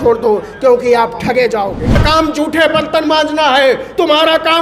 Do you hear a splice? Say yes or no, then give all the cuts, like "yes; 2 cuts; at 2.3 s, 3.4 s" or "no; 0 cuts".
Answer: yes; 1 cut; at 2.0 s